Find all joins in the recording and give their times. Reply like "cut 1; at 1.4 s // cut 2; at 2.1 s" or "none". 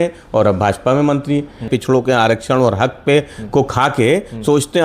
cut 1; at 1.7 s